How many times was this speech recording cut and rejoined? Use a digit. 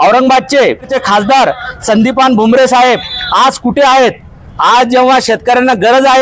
1